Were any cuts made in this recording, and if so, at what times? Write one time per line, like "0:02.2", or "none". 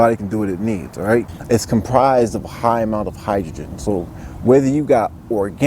0:01.3